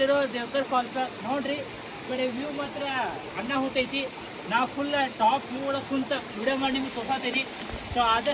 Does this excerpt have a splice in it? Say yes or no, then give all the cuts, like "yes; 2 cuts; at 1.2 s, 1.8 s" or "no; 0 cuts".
no; 0 cuts